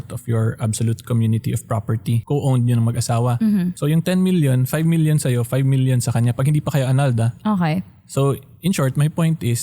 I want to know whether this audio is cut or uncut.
cut